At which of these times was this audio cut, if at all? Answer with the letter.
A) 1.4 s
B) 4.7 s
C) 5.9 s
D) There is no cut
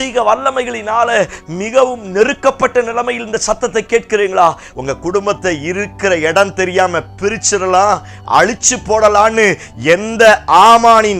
B